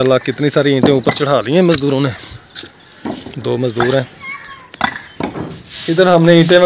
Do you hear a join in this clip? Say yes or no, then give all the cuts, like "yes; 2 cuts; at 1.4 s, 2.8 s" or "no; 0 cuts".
yes; 1 cut; at 5.5 s